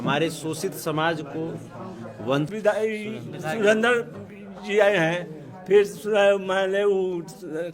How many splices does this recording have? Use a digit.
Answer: 1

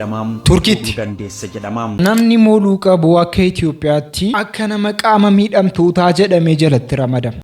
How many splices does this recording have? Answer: 1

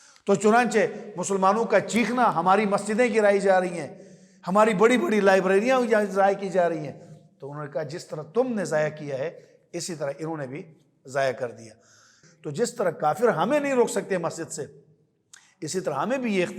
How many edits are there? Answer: 1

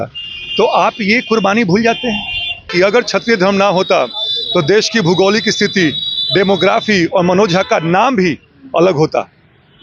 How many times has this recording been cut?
1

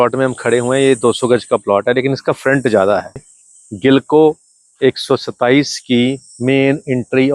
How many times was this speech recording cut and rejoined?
1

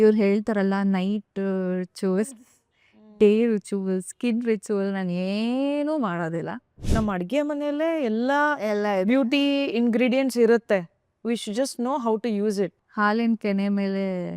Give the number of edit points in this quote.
2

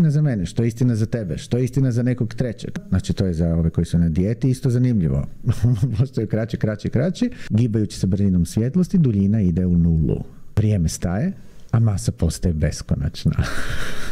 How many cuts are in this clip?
3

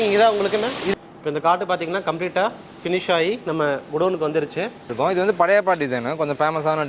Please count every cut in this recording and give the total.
2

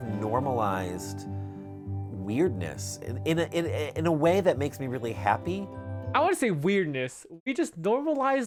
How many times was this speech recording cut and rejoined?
0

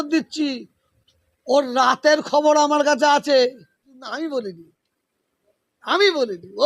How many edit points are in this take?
1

